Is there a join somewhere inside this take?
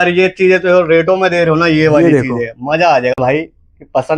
yes; 1 cut; at 3.1 s

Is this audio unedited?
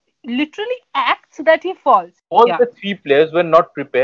no; 1 cut; at 2.3 s

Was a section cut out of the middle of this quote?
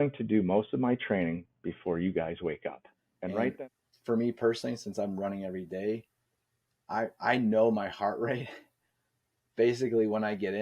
yes; 1 cut; at 3.5 s

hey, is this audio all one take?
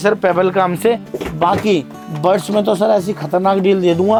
yes; 0 cuts

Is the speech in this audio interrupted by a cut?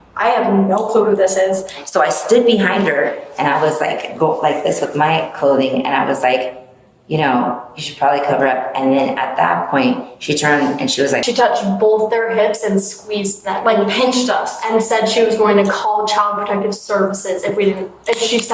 yes; 2 cuts; at 1.3 s, 11.2 s

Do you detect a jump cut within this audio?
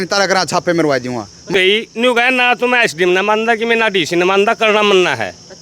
yes; 1 cut; at 1.5 s

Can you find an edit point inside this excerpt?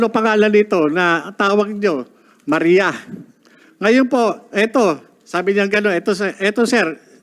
no; 0 cuts

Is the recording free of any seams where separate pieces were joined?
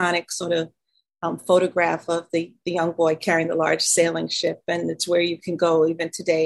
yes; 0 cuts

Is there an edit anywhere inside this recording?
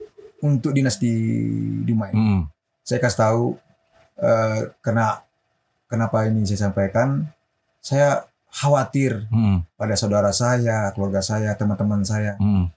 no; 0 cuts

